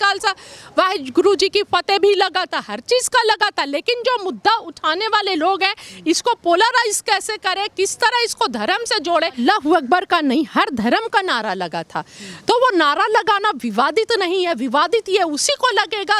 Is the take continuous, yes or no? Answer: no